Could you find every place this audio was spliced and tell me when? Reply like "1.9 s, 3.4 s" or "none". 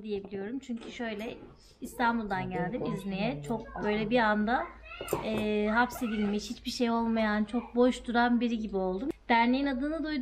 9.1 s